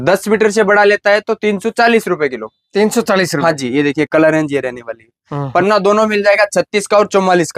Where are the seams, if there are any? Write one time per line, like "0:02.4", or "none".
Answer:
none

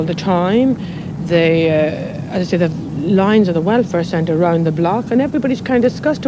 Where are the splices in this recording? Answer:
none

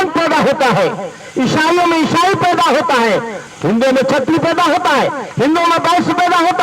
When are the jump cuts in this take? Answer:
0:03.4

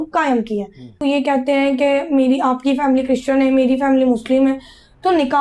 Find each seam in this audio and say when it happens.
0:01.0

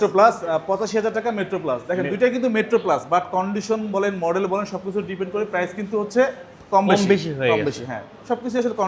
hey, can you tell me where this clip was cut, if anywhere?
none

